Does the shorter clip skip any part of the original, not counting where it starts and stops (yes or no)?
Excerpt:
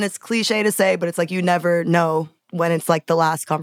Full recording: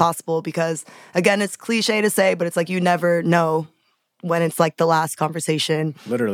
yes